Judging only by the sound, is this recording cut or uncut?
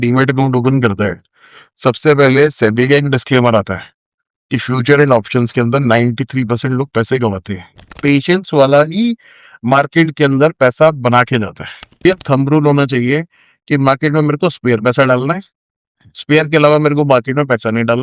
cut